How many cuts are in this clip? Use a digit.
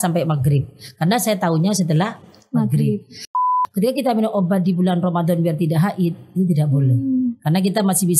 1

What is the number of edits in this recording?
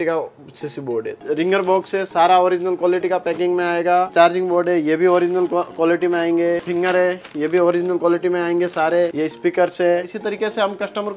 5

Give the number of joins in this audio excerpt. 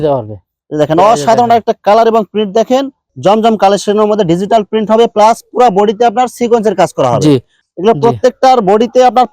2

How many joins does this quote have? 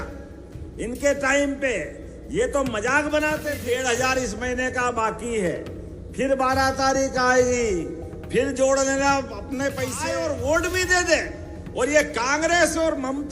2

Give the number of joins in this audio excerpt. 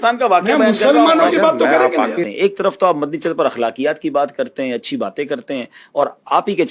1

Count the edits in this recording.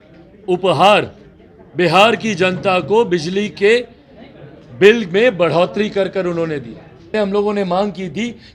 1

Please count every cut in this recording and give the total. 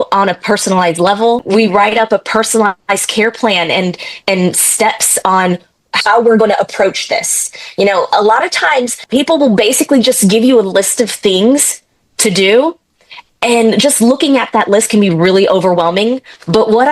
1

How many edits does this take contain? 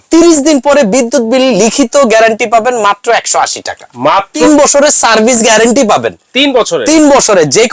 1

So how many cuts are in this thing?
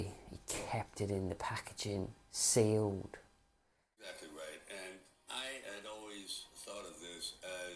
1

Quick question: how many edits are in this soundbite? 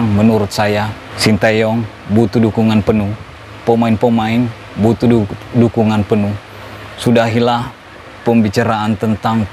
1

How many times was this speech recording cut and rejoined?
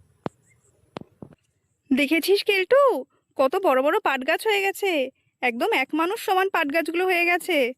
1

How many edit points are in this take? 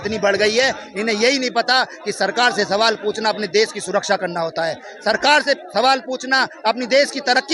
0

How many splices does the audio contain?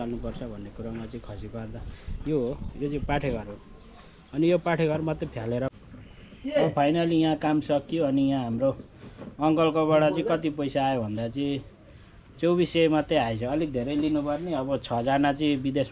1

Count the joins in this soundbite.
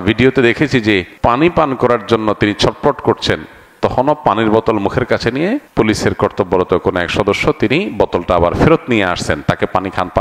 2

